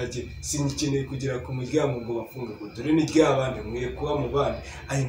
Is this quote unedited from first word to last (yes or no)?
yes